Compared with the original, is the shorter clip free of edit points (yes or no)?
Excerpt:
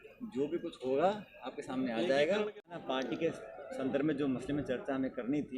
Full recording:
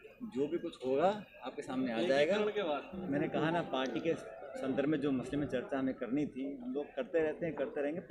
no